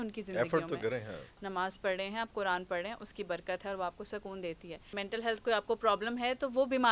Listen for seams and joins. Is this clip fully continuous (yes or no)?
no